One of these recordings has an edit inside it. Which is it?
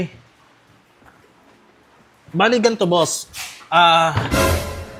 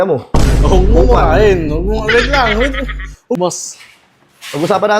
second; 1 cut; at 3.4 s

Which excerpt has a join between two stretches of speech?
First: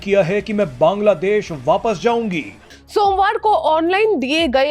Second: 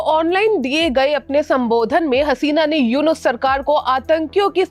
first; 1 cut; at 2.6 s

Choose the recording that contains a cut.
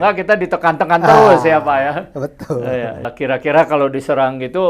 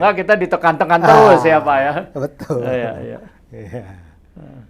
first; 1 cut; at 3.1 s

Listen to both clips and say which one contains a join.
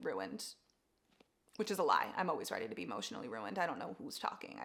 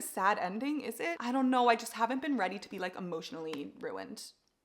second; 1 cut; at 1.2 s

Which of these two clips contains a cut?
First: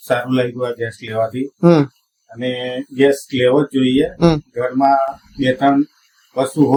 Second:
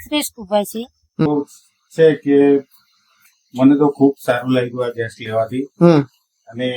second; 1 cut; at 1.2 s

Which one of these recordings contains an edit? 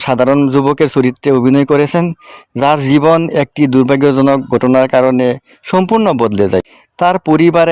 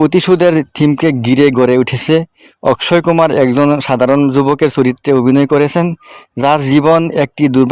first; 1 cut; at 6.8 s

